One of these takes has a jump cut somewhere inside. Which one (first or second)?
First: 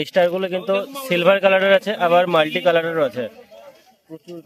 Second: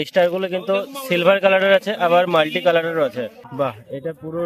second